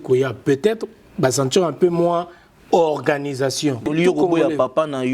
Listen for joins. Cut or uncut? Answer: cut